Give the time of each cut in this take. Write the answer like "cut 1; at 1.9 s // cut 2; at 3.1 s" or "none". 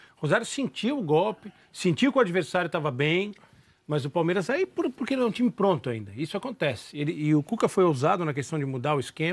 cut 1; at 5.3 s